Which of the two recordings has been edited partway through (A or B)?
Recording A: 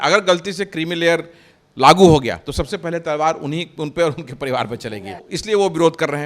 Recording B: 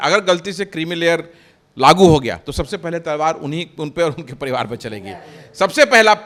A